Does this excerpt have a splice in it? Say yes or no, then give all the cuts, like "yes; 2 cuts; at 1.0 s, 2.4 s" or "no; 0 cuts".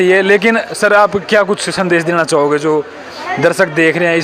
no; 0 cuts